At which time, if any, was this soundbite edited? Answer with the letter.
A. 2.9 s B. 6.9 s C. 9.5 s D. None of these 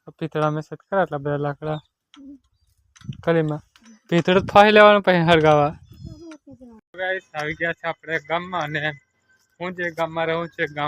B